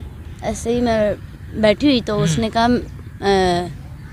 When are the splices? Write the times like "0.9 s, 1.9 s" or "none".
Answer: none